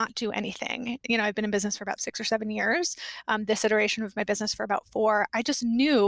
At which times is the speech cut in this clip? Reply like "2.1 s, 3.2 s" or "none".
1.0 s, 2.1 s